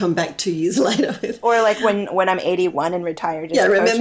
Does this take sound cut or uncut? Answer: uncut